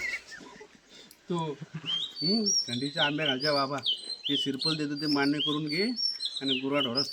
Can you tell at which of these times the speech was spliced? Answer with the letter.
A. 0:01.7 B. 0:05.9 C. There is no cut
C